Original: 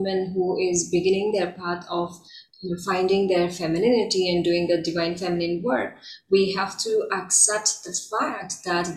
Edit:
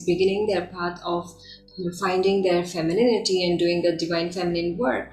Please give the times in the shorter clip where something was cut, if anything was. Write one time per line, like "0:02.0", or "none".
none